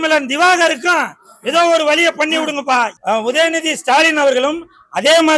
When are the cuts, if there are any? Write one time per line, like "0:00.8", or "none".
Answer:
0:03.0

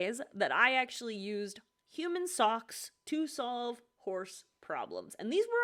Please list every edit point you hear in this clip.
none

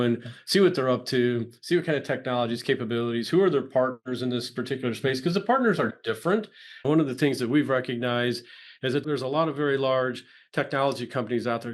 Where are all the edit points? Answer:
0:09.0

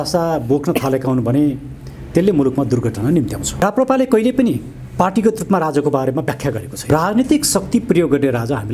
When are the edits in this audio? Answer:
0:03.6
0:06.8

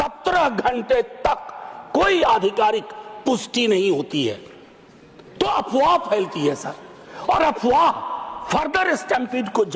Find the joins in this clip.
none

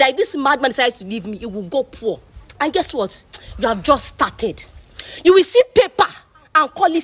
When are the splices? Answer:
none

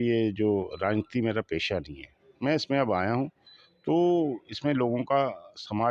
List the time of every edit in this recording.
none

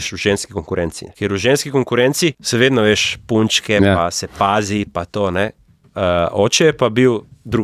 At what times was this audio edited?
0:01.0
0:02.4

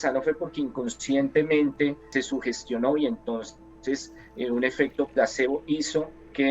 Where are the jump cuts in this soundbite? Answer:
0:02.0

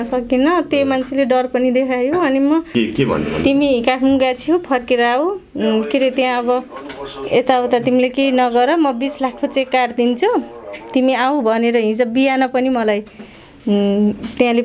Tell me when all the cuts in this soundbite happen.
0:02.7

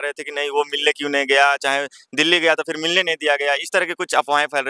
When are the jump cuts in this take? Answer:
none

